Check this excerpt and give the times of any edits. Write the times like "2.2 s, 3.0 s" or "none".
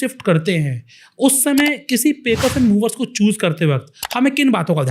none

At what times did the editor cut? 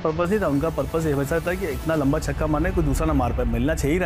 none

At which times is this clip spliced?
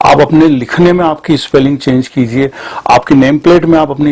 none

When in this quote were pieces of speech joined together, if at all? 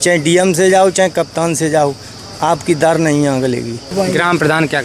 3.9 s

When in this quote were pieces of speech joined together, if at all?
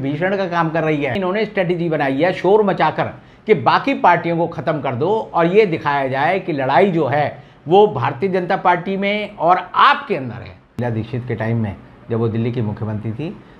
1.2 s, 10.7 s

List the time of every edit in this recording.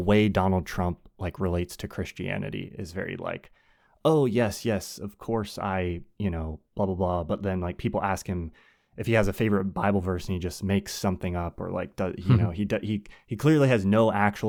none

